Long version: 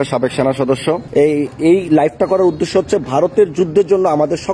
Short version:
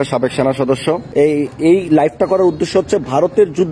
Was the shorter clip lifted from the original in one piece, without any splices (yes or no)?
yes